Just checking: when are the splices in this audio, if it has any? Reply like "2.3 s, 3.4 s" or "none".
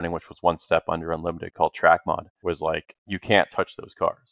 2.3 s

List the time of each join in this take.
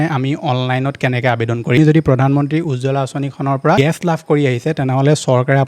1.8 s, 3.8 s

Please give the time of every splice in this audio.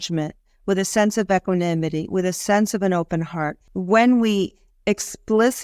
3.7 s

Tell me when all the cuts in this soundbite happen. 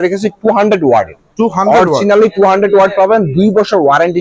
none

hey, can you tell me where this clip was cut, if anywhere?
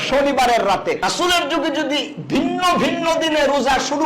1.0 s

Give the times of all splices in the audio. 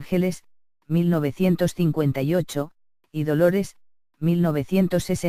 none

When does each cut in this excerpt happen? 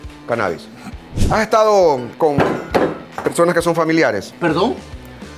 1.2 s, 2.1 s, 3.1 s, 4.3 s

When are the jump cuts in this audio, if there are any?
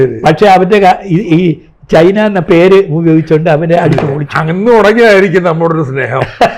none

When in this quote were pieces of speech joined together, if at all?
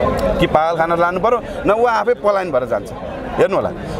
none

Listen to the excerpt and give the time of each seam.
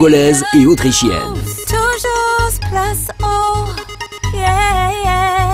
none

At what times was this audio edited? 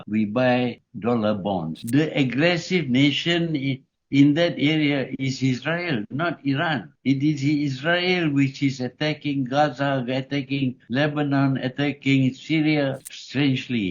1.7 s, 13.1 s

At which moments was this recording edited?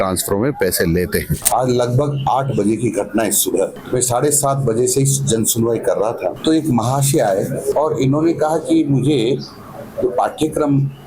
1.3 s, 3.8 s, 6.4 s, 7.7 s

